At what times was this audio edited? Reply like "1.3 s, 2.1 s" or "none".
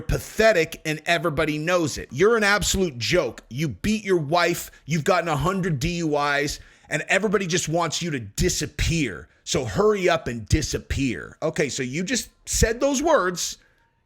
2.1 s